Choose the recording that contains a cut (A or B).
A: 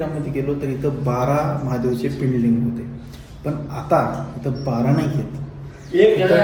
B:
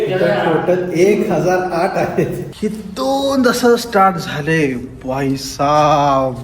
B